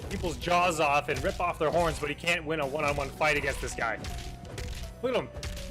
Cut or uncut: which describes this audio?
cut